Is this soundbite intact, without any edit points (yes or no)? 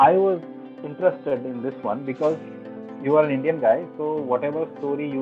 yes